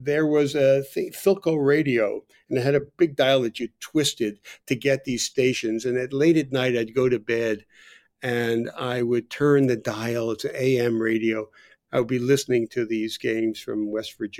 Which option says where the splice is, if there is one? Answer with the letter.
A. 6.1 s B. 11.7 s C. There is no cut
B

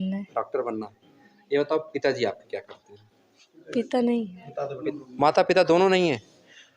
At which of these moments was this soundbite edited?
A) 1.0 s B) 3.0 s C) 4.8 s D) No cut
C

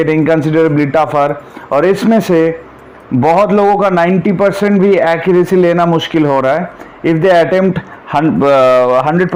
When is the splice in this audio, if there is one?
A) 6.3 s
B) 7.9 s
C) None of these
C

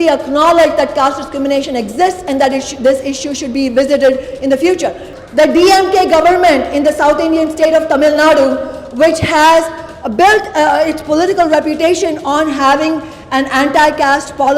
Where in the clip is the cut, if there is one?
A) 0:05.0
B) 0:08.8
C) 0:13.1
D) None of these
A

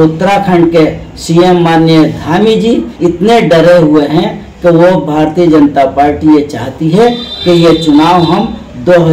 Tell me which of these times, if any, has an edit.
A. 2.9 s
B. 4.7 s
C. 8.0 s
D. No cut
A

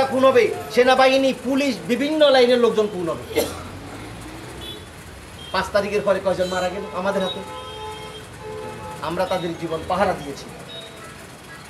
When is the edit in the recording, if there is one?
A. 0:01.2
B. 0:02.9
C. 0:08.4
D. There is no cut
D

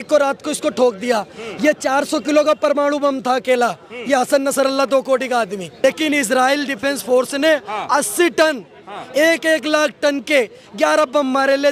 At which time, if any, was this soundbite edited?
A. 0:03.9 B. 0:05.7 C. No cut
B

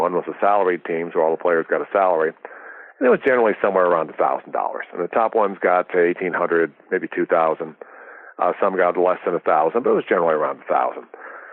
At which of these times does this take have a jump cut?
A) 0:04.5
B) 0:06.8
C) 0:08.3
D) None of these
D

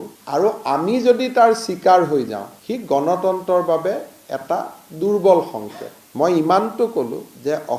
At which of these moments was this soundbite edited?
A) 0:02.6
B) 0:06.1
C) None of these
C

